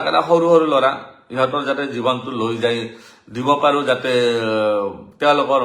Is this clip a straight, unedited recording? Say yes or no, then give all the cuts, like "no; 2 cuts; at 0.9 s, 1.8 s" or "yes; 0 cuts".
yes; 0 cuts